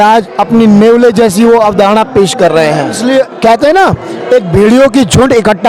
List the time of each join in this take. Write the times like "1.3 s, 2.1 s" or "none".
3.0 s

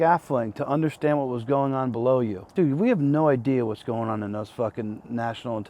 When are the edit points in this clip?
2.4 s

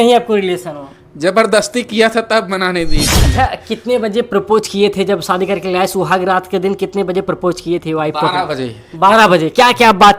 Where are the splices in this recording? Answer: 3.3 s

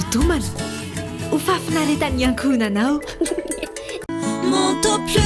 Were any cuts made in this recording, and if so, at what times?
none

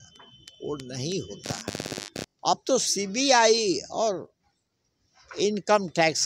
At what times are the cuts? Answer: 2.2 s

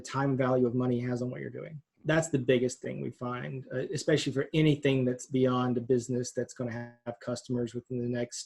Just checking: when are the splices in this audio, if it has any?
2.0 s

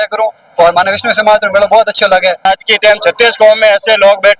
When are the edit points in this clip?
2.5 s

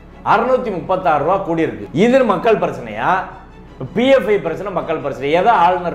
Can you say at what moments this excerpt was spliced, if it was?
none

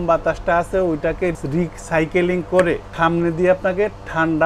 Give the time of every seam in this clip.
2.9 s

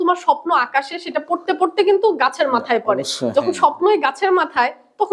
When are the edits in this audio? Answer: none

